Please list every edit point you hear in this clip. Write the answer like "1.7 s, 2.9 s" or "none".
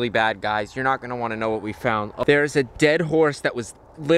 2.1 s